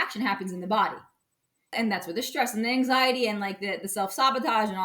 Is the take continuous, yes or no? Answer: no